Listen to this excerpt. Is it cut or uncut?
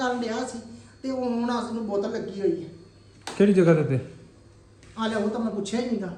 uncut